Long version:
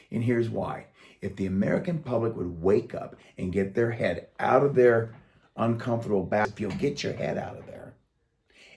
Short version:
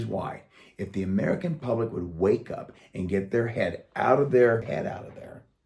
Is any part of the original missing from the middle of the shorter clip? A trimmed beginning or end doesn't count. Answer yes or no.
yes